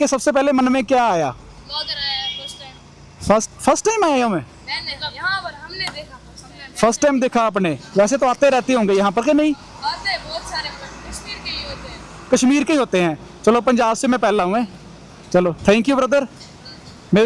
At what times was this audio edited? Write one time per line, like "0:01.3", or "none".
none

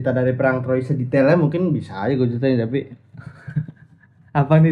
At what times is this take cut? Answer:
none

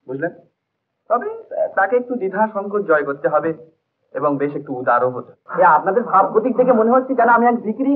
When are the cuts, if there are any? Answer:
0:05.4

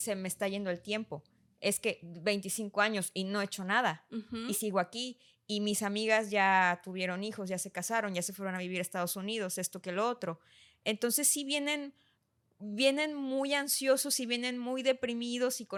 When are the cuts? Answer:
none

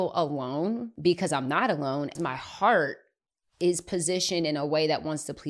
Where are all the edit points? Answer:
0:00.9
0:02.1

